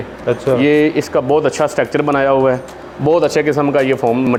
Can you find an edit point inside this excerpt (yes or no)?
no